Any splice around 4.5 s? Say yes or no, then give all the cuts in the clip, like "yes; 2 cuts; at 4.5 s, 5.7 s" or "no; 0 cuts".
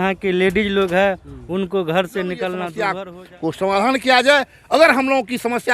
no; 1 cut; at 2.8 s